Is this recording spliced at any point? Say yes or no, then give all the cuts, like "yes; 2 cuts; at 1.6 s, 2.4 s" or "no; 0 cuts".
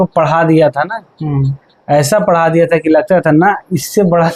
no; 0 cuts